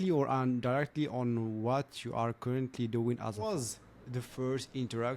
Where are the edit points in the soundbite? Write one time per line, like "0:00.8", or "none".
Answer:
0:03.4